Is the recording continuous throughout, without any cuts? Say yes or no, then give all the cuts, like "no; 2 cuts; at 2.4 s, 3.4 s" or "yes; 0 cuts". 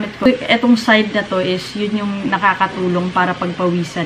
yes; 0 cuts